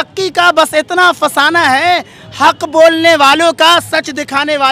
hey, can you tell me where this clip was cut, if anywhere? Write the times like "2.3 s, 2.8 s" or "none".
none